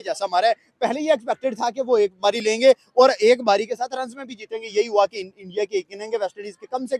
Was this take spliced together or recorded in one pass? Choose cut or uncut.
uncut